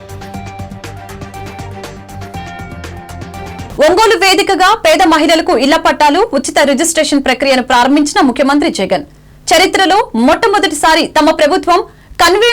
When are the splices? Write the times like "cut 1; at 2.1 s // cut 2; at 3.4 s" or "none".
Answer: cut 1; at 3.7 s